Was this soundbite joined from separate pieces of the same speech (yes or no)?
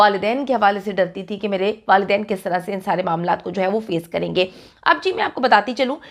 no